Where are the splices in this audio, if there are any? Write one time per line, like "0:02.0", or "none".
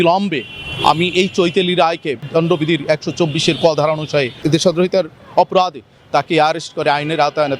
0:02.2
0:04.4